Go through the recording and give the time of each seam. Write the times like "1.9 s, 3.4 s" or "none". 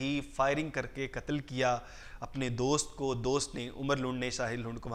none